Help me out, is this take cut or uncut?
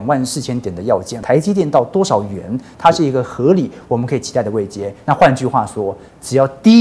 cut